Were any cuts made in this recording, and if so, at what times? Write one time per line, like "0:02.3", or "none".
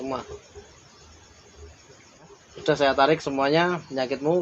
0:02.3